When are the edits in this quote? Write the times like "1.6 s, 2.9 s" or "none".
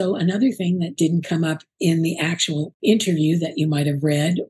0.9 s, 2.7 s